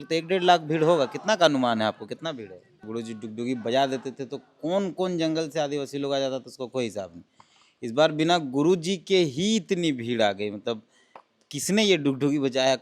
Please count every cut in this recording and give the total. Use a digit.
1